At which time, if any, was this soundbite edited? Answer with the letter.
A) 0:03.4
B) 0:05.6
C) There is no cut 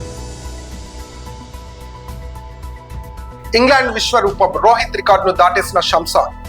A